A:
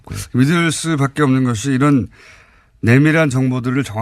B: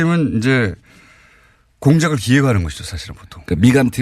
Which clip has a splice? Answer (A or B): B